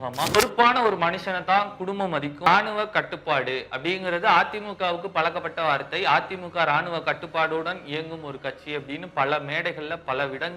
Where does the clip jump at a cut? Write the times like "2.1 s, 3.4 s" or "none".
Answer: 2.5 s